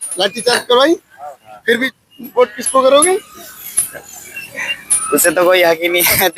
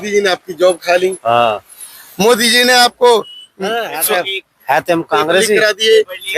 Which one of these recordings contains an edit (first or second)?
first